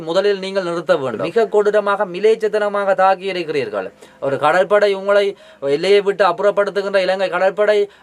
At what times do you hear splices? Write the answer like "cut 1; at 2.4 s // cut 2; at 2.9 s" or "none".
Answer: cut 1; at 1.2 s